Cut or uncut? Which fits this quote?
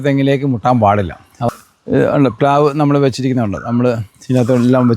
cut